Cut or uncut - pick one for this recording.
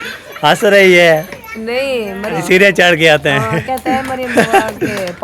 cut